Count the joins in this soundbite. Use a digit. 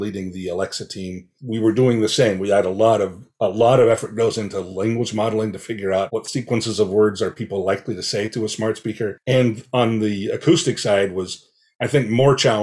2